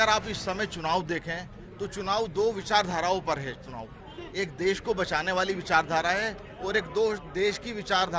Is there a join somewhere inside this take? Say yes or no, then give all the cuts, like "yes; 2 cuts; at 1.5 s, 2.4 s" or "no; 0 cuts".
no; 0 cuts